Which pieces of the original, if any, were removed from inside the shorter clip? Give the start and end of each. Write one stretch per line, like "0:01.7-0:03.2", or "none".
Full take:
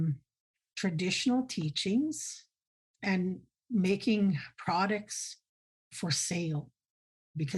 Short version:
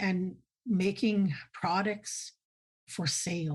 none